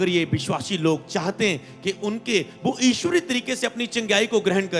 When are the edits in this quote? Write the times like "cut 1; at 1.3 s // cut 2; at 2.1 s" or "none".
none

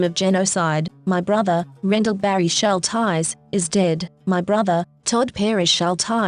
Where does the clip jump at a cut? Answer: cut 1; at 0.9 s

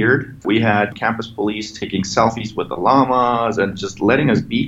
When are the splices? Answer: cut 1; at 0.9 s

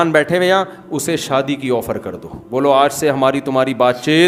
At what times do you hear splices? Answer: none

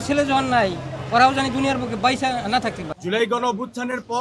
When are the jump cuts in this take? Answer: cut 1; at 2.9 s

